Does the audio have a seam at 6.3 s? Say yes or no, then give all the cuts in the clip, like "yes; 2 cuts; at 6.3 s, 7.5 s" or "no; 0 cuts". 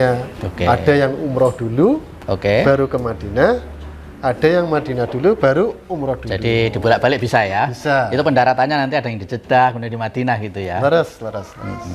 no; 0 cuts